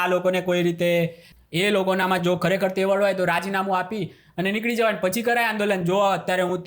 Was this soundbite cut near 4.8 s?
no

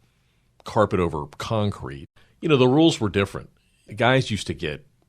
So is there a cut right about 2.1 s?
yes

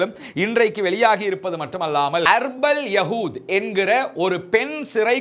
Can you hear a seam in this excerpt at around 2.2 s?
yes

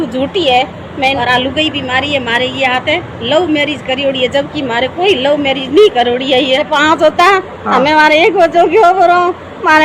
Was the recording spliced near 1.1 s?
yes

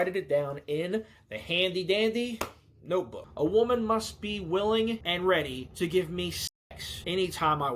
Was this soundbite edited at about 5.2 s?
yes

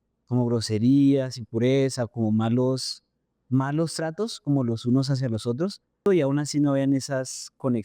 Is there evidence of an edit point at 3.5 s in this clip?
no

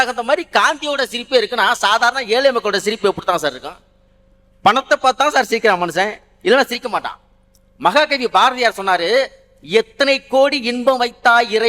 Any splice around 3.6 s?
no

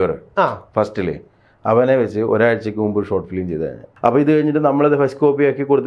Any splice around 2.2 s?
no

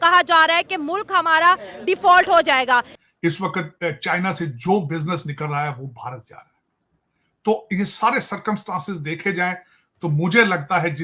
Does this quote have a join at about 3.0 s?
yes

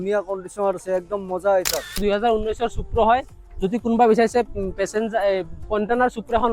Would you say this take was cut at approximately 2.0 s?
yes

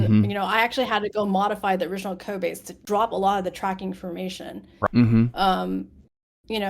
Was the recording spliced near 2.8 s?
yes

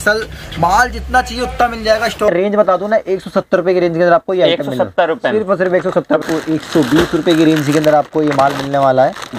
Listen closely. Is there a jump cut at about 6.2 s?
yes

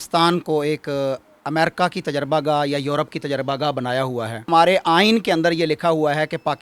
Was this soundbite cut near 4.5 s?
yes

